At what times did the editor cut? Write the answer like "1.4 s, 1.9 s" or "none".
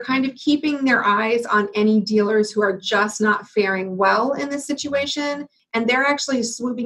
5.5 s